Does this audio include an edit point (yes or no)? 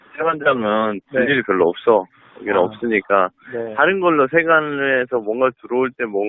yes